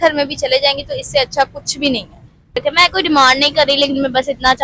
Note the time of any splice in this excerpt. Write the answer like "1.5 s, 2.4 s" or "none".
2.6 s

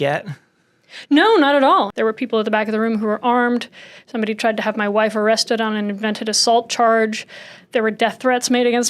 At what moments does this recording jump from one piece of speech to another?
1.9 s

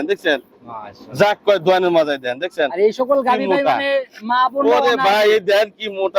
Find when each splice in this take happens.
none

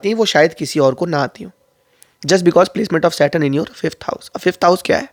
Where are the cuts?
none

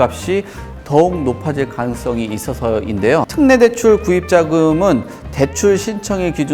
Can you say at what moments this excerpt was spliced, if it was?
none

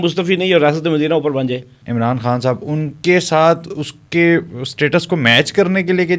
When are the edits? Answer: 1.8 s

